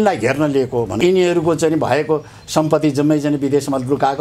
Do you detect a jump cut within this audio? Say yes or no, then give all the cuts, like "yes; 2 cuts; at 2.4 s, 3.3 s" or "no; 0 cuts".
yes; 1 cut; at 1.0 s